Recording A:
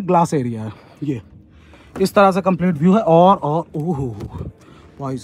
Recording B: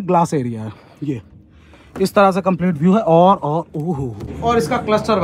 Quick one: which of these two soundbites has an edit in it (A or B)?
B